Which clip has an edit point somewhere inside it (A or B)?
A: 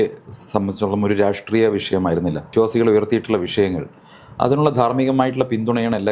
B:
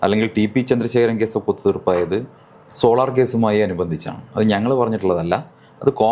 A